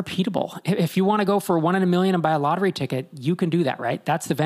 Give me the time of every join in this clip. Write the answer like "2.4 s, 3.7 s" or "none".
none